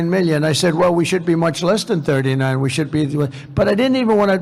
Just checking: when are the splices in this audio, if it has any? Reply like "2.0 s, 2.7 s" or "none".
none